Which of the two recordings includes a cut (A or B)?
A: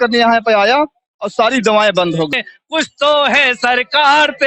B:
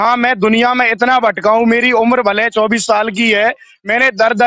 A